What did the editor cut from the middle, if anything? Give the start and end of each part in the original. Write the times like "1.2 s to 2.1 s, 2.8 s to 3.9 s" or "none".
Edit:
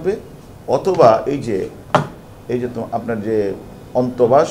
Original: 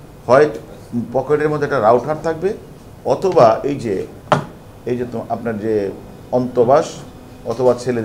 none